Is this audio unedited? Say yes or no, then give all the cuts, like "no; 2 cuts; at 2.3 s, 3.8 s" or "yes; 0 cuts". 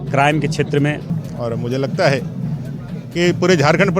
no; 1 cut; at 1.0 s